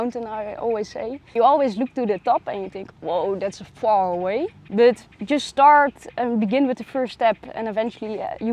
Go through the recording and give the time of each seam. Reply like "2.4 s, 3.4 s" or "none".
1.3 s, 4.6 s